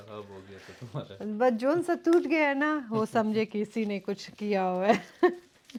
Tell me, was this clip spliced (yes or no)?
no